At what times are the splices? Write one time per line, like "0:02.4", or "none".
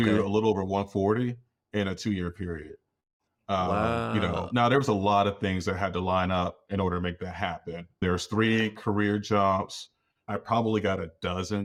none